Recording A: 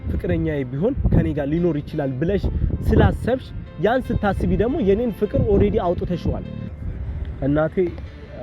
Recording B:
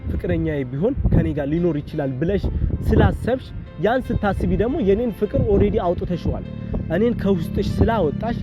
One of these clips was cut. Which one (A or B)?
A